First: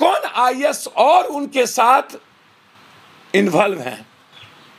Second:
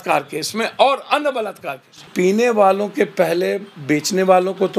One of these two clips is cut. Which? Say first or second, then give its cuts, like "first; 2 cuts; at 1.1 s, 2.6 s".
second; 1 cut; at 2.1 s